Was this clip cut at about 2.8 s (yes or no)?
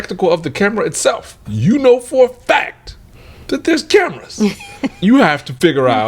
no